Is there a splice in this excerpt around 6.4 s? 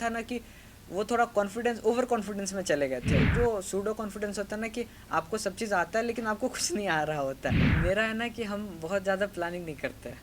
no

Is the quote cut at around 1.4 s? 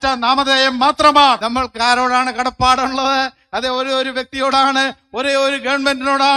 yes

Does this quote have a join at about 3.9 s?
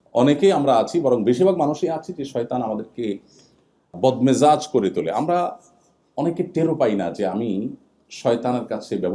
yes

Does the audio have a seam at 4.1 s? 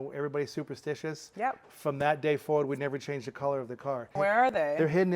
yes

